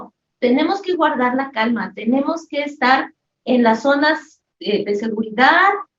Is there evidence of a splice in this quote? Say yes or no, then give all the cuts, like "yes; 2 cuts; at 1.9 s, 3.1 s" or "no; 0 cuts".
no; 0 cuts